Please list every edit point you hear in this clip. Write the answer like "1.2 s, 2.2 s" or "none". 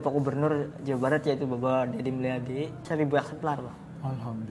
2.8 s